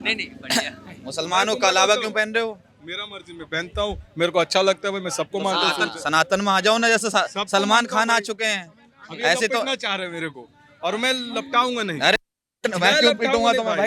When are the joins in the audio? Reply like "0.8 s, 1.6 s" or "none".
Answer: none